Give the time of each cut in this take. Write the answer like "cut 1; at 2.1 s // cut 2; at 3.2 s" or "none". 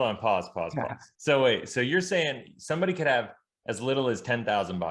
cut 1; at 1.0 s

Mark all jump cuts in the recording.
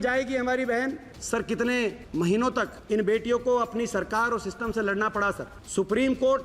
cut 1; at 1.1 s // cut 2; at 2.5 s // cut 3; at 5.5 s

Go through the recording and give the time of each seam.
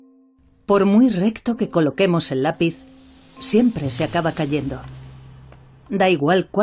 none

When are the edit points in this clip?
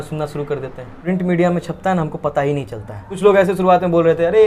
cut 1; at 1.0 s // cut 2; at 3.1 s

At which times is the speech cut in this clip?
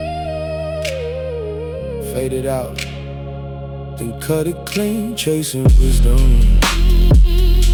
none

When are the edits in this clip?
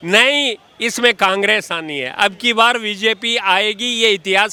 none

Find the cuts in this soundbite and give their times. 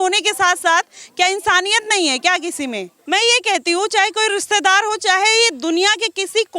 cut 1; at 2.9 s

